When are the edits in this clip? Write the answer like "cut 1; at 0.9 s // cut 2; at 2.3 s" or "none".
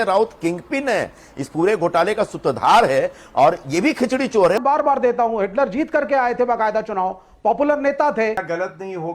cut 1; at 4.6 s // cut 2; at 8.3 s